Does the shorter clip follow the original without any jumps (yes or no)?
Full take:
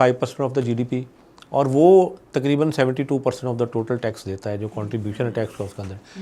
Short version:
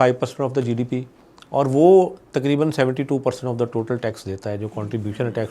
yes